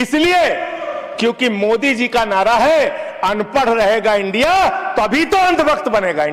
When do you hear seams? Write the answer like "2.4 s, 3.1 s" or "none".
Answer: none